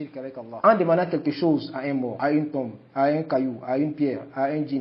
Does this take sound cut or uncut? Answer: uncut